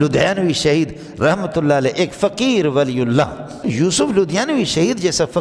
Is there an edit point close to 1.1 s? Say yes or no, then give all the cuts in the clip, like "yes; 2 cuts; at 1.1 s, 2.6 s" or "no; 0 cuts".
no; 1 cut; at 4.0 s